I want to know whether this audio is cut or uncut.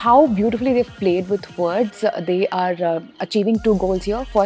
cut